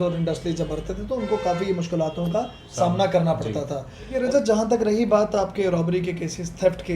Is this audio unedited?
no; 1 cut; at 4.2 s

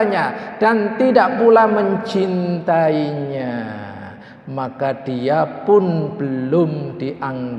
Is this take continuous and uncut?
yes; 0 cuts

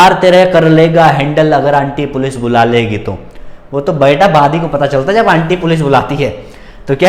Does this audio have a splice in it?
no; 0 cuts

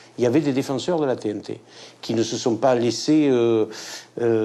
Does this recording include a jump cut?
no; 0 cuts

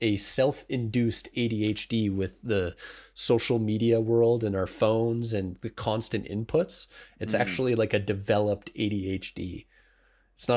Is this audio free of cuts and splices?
yes; 0 cuts

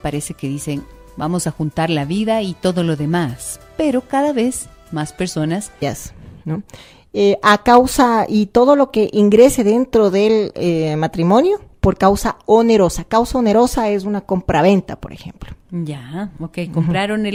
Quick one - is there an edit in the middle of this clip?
no; 0 cuts

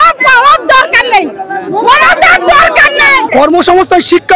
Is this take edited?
yes; 1 cut; at 3.2 s

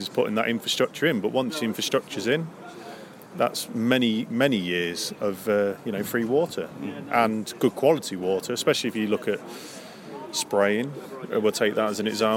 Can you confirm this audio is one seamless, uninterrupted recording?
yes; 0 cuts

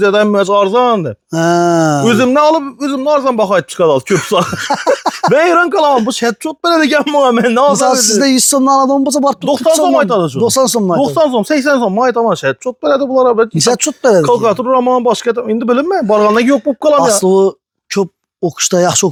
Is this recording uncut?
yes; 0 cuts

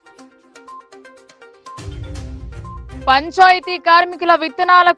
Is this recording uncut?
no; 1 cut; at 1.3 s

